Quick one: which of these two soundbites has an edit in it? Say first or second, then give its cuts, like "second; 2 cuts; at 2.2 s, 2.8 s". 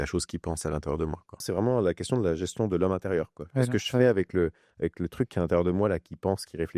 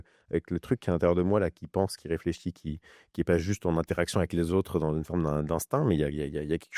first; 1 cut; at 1.4 s